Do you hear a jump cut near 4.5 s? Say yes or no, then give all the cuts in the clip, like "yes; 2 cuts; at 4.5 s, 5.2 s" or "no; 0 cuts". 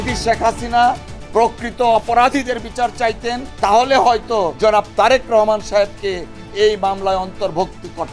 yes; 2 cuts; at 3.7 s, 4.5 s